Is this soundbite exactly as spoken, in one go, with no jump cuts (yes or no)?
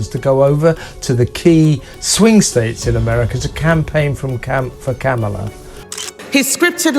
no